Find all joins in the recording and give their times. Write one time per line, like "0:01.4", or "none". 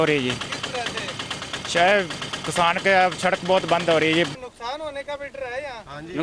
0:04.4